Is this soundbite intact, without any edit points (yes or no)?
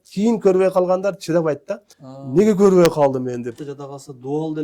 no